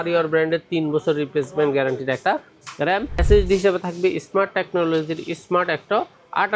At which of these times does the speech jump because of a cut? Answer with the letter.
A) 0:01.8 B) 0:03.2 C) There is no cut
B